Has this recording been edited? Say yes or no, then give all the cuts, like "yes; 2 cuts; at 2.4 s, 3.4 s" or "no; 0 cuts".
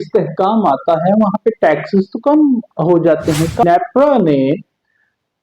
yes; 1 cut; at 3.6 s